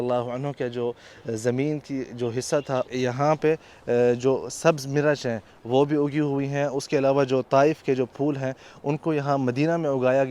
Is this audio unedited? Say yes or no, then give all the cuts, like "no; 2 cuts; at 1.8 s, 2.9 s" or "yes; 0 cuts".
no; 1 cut; at 2.9 s